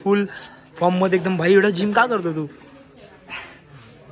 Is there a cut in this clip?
no; 0 cuts

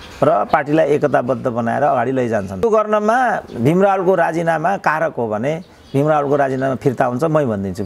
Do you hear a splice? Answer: no; 0 cuts

